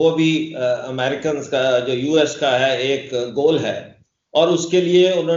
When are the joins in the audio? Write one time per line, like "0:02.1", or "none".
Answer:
none